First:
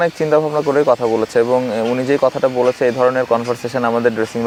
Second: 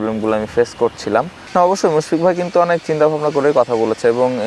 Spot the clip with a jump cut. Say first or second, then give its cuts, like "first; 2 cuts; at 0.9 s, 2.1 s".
second; 1 cut; at 1.4 s